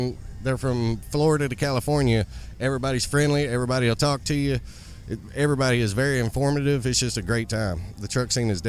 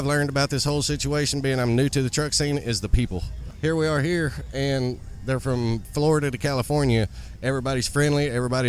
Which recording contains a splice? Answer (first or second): second